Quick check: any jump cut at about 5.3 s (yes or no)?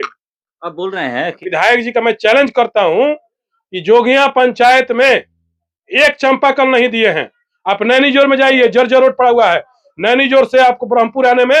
no